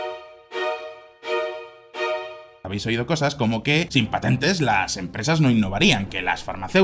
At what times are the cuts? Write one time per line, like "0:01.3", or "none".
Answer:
0:01.4
0:02.6